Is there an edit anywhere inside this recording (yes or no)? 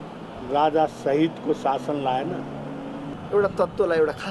yes